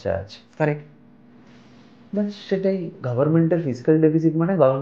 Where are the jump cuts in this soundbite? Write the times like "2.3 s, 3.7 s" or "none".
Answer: none

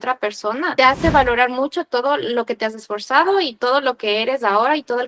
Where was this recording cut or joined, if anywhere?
none

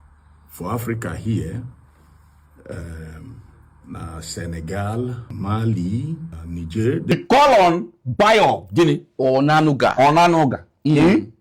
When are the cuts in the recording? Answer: 7.1 s

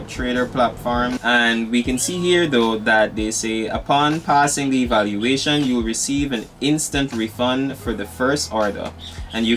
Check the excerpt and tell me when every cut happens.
1.2 s

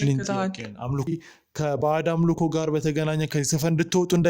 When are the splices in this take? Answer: 1.1 s

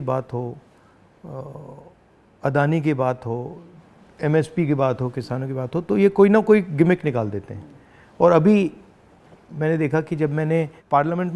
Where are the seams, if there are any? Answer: none

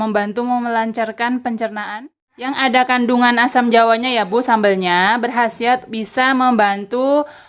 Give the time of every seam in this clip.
2.5 s

